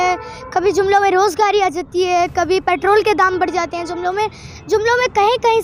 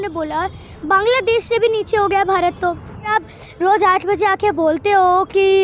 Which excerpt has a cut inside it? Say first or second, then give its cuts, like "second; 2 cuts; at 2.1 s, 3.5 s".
second; 1 cut; at 3.1 s